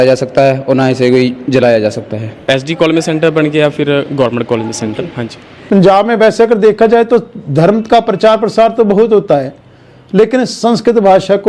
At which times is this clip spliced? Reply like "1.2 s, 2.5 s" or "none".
2.5 s, 5.6 s